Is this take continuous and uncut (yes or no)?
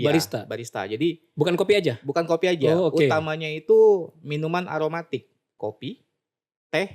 no